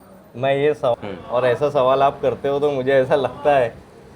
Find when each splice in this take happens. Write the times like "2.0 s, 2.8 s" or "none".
0.9 s